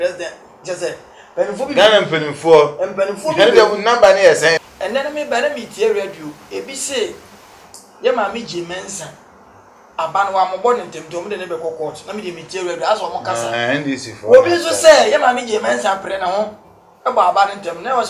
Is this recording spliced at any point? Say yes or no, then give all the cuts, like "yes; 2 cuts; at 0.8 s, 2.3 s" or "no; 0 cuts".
yes; 1 cut; at 4.6 s